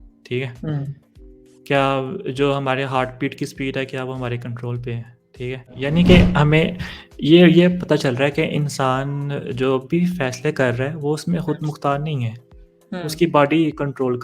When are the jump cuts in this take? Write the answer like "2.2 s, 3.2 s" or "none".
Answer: 5.8 s